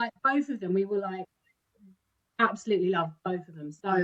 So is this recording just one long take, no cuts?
yes; 0 cuts

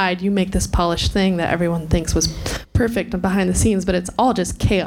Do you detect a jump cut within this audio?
no; 0 cuts

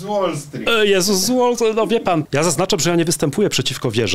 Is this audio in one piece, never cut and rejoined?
no; 1 cut; at 2.2 s

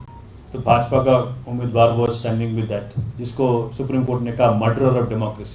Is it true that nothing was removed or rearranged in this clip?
yes; 0 cuts

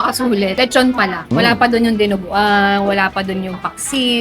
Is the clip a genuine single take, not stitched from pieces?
no; 1 cut; at 1.3 s

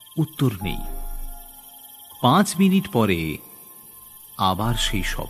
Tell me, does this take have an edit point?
no; 0 cuts

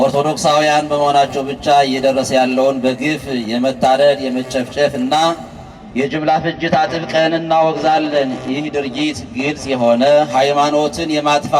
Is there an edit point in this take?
no; 0 cuts

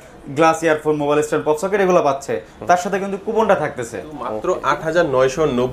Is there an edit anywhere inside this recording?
yes; 1 cut; at 4.3 s

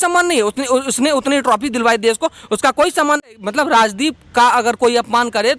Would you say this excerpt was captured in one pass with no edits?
no; 1 cut; at 3.3 s

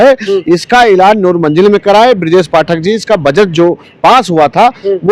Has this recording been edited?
no; 0 cuts

